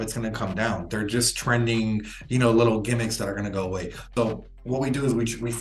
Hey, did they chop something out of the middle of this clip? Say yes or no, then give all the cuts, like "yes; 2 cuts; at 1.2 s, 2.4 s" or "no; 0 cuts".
yes; 1 cut; at 4.0 s